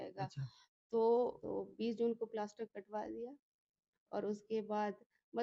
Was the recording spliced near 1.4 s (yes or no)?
yes